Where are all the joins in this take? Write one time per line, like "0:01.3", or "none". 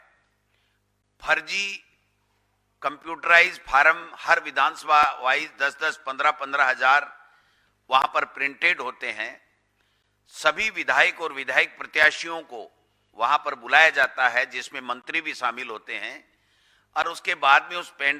none